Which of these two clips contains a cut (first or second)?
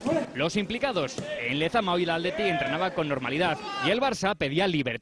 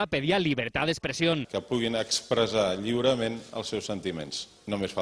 first